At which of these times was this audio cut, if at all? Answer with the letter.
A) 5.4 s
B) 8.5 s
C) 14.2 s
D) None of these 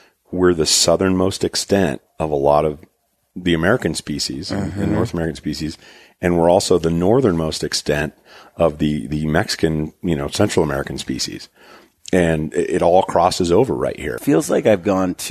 C